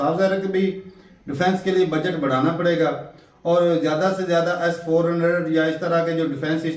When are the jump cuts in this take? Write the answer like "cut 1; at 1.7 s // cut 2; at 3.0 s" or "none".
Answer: none